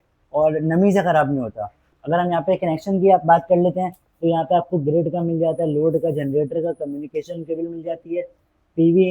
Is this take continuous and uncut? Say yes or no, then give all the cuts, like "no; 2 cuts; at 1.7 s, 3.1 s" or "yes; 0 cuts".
no; 1 cut; at 1.9 s